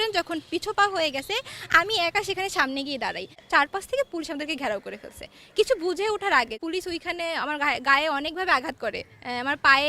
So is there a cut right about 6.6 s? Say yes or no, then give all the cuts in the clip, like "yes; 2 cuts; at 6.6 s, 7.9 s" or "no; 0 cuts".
yes; 2 cuts; at 3.4 s, 6.6 s